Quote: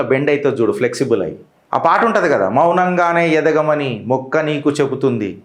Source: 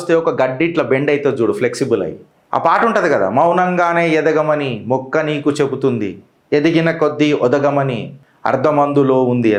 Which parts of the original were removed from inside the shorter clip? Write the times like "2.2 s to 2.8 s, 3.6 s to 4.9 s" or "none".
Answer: none